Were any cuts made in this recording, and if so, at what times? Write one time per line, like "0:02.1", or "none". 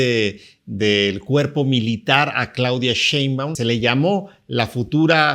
0:03.5